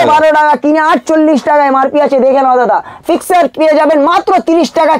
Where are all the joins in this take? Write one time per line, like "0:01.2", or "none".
0:03.0